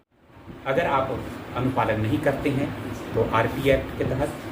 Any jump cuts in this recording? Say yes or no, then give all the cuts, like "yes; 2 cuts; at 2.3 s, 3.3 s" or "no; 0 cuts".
no; 0 cuts